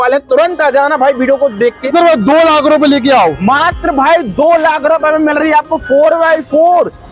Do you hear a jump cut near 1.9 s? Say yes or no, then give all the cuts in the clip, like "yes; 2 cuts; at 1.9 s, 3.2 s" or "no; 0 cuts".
yes; 1 cut; at 1.9 s